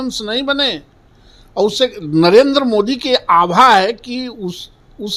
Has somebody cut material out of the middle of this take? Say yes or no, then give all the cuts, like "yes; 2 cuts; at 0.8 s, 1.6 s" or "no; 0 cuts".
no; 0 cuts